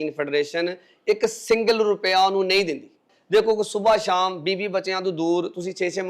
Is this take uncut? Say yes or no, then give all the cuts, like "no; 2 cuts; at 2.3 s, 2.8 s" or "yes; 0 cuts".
no; 1 cut; at 3.1 s